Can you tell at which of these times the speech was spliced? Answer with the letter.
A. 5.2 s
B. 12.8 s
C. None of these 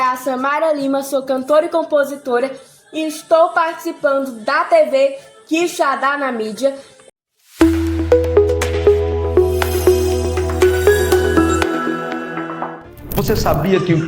B